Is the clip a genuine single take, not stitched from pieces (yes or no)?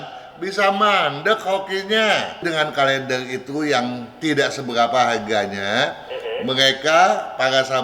no